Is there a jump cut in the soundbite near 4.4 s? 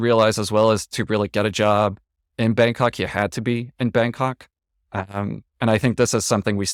no; 0 cuts

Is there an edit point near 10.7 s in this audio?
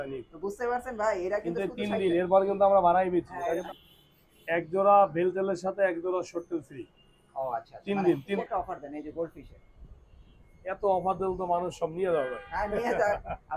no; 2 cuts; at 3.6 s, 8.4 s

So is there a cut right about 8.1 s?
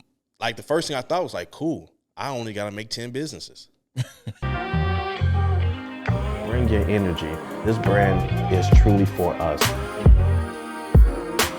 no; 1 cut; at 4.4 s

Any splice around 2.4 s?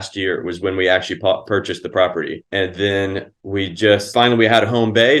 yes; 3 cuts; at 2.4 s, 3.3 s, 4.1 s

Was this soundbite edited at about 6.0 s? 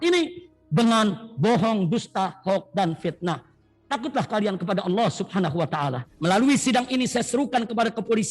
yes; 1 cut; at 6.0 s

